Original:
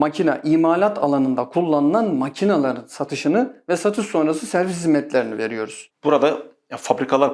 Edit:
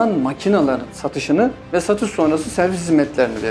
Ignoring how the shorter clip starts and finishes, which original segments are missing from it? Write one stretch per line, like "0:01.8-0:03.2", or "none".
none